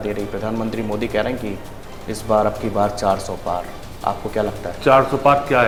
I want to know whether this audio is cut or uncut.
uncut